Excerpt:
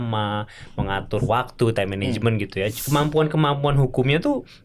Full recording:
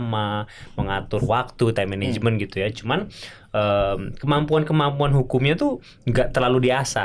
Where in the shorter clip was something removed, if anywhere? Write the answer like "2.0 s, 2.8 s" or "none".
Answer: 2.8 s